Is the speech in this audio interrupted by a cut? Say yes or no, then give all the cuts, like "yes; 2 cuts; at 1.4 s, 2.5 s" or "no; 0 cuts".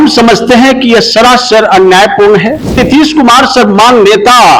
yes; 1 cut; at 2.8 s